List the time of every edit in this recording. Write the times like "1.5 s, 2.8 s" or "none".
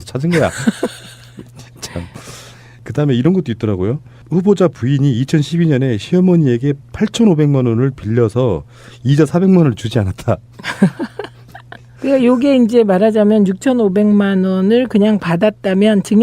11.6 s